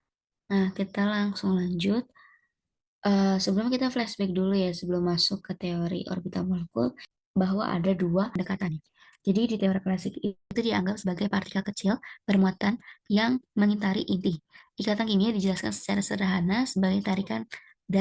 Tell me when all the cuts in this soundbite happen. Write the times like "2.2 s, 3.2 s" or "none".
7.1 s, 8.4 s, 10.5 s